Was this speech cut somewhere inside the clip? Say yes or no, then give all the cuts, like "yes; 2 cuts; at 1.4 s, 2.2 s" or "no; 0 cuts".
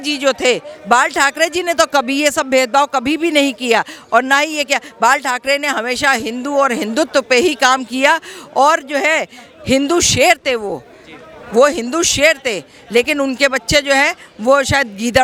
no; 0 cuts